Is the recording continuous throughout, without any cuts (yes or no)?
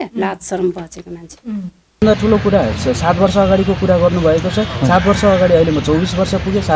no